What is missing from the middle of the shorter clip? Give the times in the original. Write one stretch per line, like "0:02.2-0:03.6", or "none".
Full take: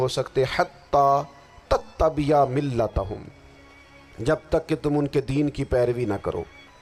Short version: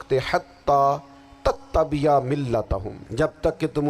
0:03.2-0:04.1